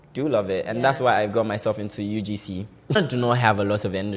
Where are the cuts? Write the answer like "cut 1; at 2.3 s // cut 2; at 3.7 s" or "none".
cut 1; at 3.0 s